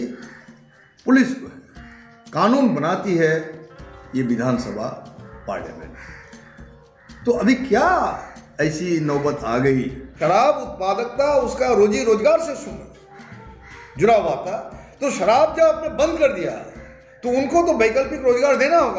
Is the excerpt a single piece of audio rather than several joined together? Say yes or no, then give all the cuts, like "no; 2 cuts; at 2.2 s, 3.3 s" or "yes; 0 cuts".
no; 1 cut; at 10.2 s